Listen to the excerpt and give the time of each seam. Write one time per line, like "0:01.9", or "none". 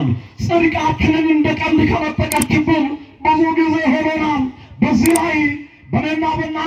none